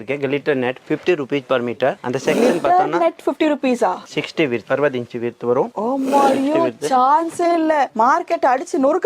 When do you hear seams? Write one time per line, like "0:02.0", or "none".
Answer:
none